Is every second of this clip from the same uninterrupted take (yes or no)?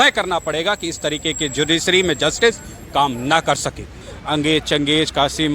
no